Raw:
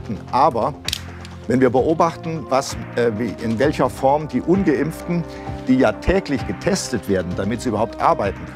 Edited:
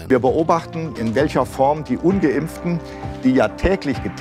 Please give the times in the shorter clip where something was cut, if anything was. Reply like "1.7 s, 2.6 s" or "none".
0.9 s